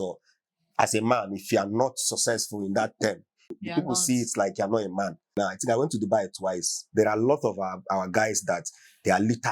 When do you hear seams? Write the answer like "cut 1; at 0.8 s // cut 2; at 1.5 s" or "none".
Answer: cut 1; at 3.6 s // cut 2; at 5.3 s

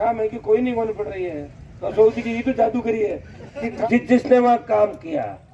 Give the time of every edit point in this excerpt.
cut 1; at 3.8 s

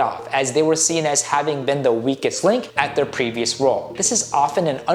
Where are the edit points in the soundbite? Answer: cut 1; at 2.7 s // cut 2; at 3.9 s

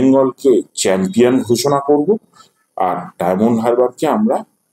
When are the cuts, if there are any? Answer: none

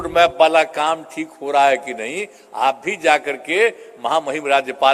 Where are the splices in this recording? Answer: none

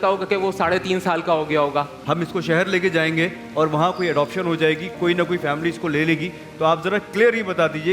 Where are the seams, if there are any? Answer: cut 1; at 2.0 s

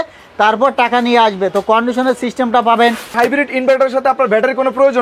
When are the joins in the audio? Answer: cut 1; at 3.1 s

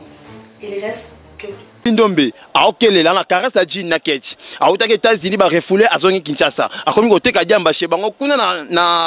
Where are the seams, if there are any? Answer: cut 1; at 1.8 s

